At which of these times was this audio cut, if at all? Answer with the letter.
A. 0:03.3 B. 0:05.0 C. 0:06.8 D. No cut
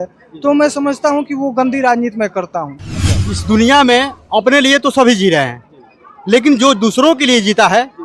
A